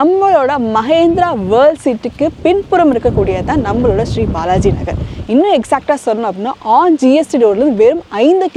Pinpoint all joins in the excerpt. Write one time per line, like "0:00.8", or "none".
none